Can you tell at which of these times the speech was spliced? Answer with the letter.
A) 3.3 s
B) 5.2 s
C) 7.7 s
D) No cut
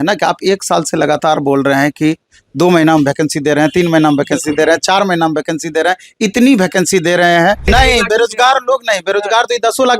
C